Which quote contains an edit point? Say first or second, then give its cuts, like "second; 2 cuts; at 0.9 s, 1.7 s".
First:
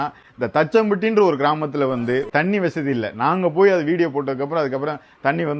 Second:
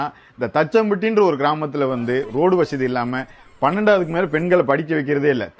first; 1 cut; at 2.3 s